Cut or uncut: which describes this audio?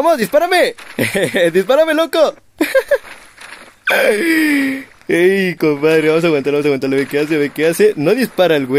uncut